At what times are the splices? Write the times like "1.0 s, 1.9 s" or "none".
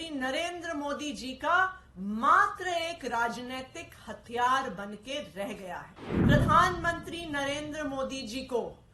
6.1 s